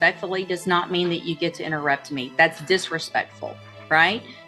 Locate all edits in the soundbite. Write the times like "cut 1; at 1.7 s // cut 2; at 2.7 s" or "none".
none